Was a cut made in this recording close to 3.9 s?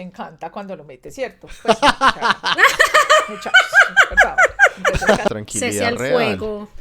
no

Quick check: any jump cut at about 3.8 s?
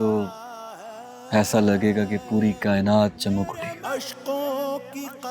yes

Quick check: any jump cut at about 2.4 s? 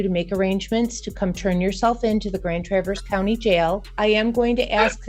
no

